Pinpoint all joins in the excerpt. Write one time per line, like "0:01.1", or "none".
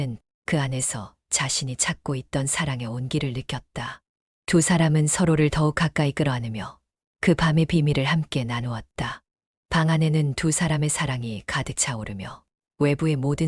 none

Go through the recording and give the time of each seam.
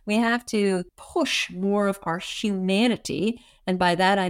0:00.9

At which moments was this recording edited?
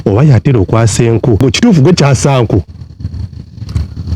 0:01.4

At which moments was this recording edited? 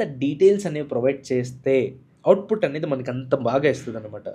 none

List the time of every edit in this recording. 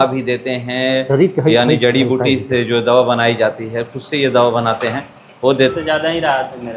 0:05.7

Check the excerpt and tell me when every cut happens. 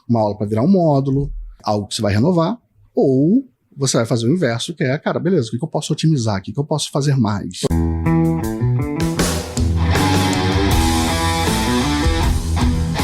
0:01.6
0:07.7

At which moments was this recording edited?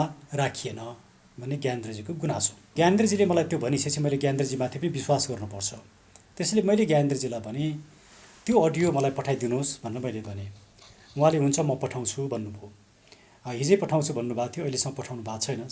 0:02.7

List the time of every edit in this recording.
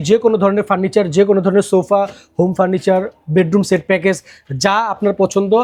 none

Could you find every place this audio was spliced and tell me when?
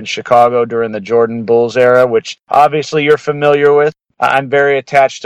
0:02.4
0:04.0

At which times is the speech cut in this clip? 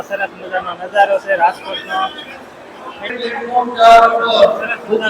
0:03.2

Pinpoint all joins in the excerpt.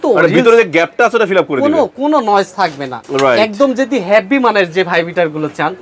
0:02.5

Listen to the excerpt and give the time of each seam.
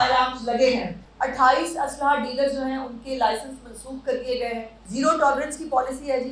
0:01.0
0:04.8

